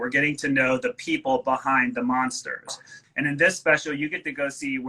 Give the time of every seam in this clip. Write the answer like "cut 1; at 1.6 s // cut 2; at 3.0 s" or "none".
cut 1; at 3.1 s